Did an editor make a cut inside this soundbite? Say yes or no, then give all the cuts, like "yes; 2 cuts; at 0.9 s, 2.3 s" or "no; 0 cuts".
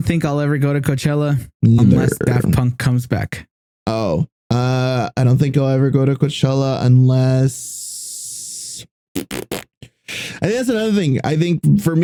no; 0 cuts